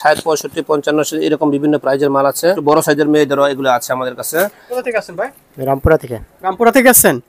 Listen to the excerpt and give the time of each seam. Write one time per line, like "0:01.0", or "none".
0:02.6
0:04.6

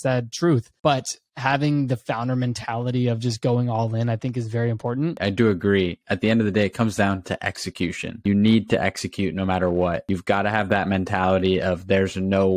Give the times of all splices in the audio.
0:05.2

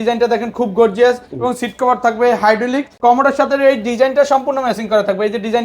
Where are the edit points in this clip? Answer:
0:02.9

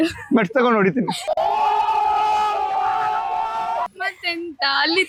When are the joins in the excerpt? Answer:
none

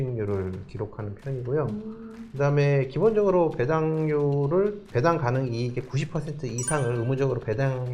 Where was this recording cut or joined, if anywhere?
0:04.9

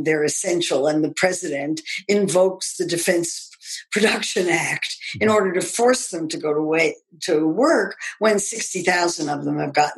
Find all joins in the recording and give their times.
none

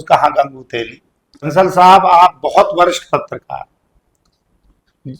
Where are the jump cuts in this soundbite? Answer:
0:01.5

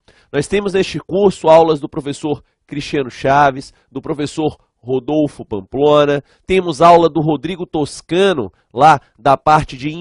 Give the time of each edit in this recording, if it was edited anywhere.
0:08.7

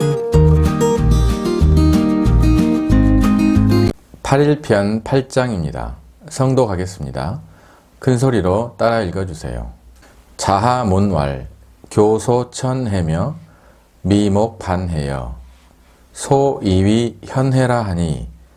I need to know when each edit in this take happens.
0:04.1

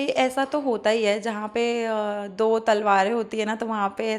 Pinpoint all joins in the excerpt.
none

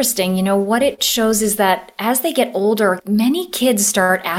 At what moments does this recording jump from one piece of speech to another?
0:03.0

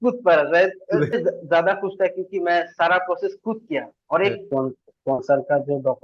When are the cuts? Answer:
0:01.1
0:04.4

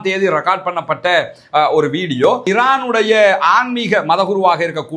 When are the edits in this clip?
0:02.4

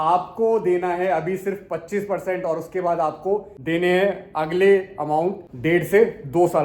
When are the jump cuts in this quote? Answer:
0:05.4

